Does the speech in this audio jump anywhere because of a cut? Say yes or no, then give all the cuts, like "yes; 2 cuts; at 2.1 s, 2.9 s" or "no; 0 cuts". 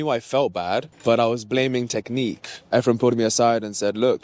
yes; 2 cuts; at 0.9 s, 2.6 s